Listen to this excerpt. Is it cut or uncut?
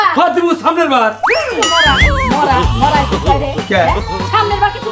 uncut